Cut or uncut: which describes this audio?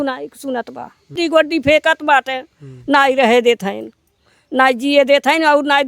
cut